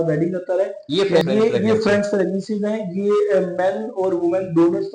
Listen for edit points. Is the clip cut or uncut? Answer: cut